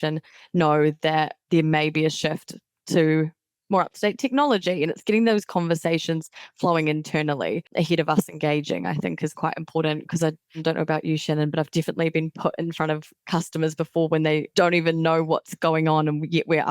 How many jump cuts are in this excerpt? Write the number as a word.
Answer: four